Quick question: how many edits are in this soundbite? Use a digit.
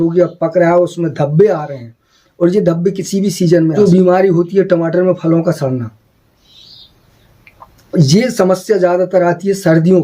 1